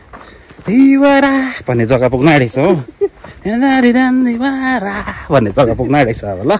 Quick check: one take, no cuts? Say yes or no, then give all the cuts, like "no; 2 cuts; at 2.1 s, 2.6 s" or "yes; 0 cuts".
yes; 0 cuts